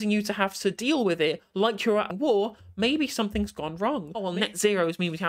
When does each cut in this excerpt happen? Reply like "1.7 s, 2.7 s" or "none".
2.1 s, 4.3 s